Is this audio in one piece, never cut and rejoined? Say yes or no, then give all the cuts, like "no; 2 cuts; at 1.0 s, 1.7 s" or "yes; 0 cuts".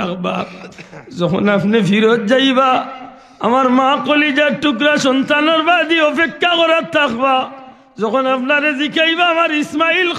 yes; 0 cuts